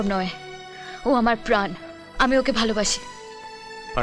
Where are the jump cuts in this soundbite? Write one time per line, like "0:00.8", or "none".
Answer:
none